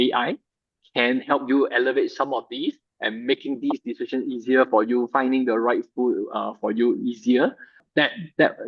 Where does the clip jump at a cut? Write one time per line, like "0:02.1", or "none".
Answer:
0:07.8